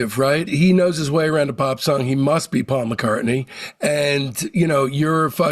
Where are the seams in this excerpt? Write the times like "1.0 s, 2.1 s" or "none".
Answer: none